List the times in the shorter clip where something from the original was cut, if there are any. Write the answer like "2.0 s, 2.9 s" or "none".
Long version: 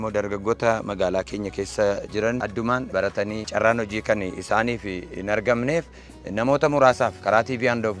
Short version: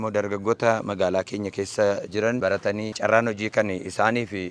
2.4 s